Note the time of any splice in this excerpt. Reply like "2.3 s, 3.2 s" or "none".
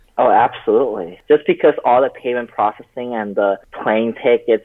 1.1 s, 3.7 s